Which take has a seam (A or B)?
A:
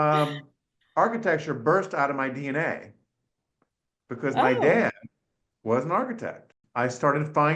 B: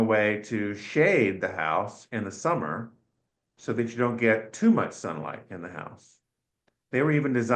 A